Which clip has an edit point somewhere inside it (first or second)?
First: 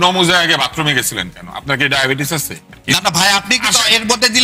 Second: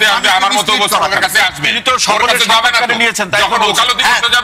first